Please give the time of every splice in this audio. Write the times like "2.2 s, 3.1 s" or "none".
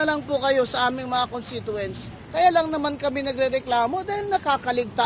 2.1 s